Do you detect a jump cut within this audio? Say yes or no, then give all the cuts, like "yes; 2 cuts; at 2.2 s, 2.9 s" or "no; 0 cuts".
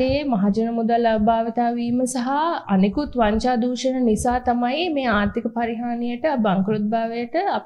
no; 0 cuts